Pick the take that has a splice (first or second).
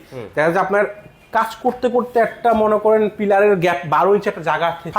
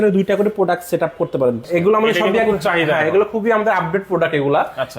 second